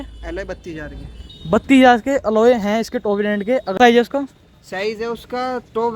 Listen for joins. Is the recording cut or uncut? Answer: cut